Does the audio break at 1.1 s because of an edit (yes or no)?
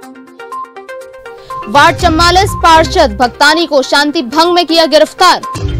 yes